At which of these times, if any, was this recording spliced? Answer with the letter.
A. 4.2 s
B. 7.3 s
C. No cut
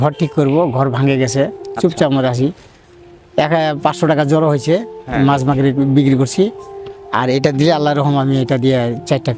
C